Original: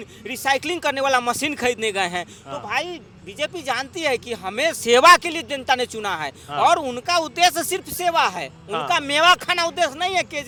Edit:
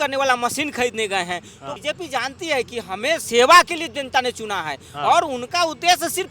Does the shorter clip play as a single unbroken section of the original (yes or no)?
no